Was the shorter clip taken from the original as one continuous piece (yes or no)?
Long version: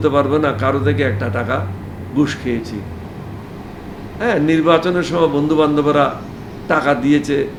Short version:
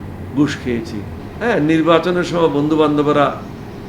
no